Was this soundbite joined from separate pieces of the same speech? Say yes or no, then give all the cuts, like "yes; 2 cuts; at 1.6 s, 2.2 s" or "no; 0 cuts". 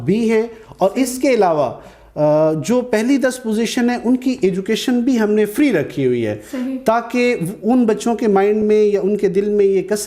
no; 0 cuts